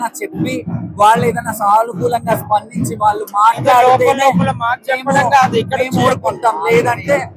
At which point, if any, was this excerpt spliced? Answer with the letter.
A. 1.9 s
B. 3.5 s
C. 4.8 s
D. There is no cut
D